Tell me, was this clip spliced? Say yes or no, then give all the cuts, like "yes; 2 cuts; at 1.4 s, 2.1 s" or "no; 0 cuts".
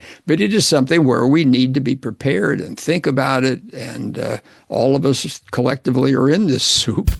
no; 0 cuts